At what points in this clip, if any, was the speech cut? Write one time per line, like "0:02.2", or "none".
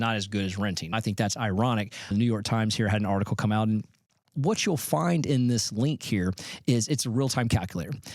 0:00.9
0:02.1
0:04.3